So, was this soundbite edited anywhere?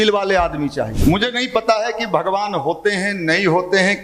yes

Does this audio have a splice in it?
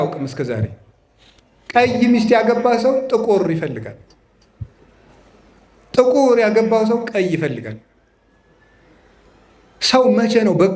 no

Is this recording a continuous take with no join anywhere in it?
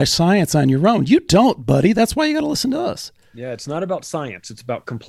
yes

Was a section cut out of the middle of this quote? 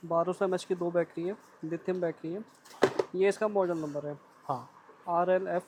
no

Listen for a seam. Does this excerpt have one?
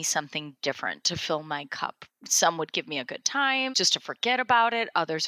yes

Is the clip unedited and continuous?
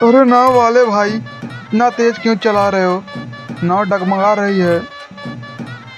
no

